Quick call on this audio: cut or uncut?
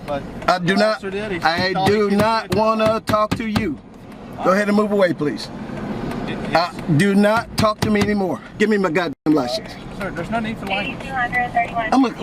cut